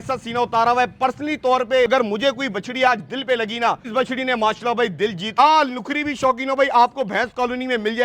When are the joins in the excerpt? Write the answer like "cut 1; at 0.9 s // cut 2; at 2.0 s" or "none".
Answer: cut 1; at 1.9 s // cut 2; at 3.8 s // cut 3; at 5.3 s